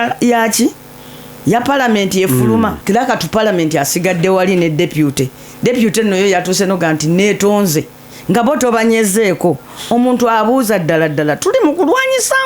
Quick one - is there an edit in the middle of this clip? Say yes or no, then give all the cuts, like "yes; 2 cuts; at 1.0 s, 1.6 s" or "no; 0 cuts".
yes; 1 cut; at 2.8 s